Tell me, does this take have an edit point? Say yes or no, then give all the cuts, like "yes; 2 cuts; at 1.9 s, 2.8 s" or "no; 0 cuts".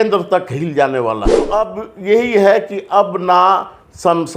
yes; 1 cut; at 1.5 s